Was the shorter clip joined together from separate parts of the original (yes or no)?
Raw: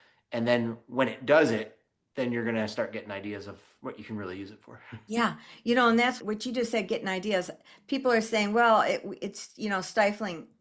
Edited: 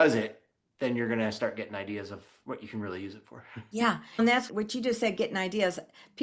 yes